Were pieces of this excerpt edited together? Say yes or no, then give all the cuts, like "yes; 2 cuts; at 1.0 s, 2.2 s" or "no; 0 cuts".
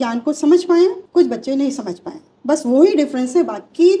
yes; 1 cut; at 1.0 s